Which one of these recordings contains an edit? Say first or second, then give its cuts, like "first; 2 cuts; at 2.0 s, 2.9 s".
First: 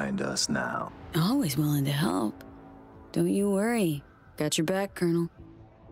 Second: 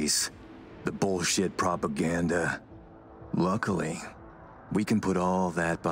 first; 1 cut; at 1.0 s